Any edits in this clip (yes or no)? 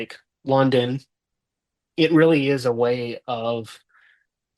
no